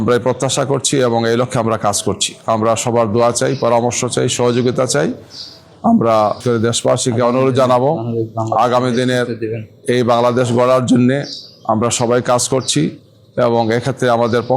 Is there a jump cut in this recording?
no; 0 cuts

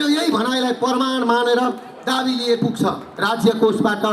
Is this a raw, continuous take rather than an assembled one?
no; 1 cut; at 3.1 s

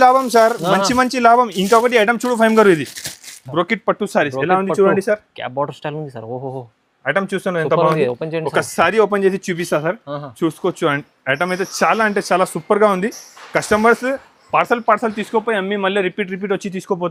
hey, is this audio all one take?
yes; 0 cuts

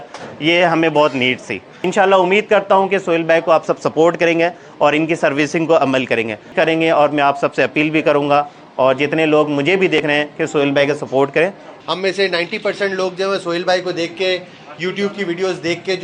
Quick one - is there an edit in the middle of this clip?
yes; 3 cuts; at 1.9 s, 6.5 s, 11.7 s

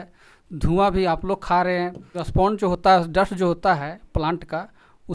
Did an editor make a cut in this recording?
yes; 1 cut; at 2.6 s

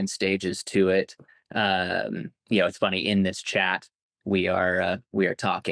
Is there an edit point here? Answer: no; 0 cuts

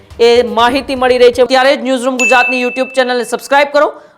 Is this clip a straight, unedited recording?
no; 1 cut; at 1.5 s

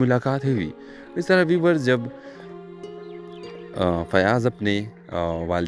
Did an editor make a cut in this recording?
no; 0 cuts

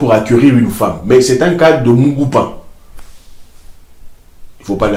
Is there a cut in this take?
no; 0 cuts

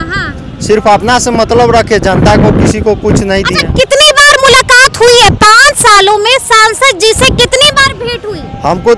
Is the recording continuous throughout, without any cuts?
yes; 0 cuts

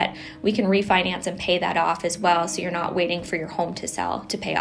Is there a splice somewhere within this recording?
no; 0 cuts

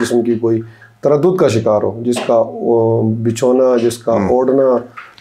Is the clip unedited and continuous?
yes; 0 cuts

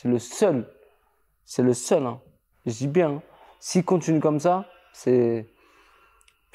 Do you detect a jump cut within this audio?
no; 0 cuts

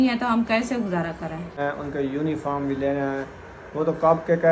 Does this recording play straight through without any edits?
no; 1 cut; at 1.6 s

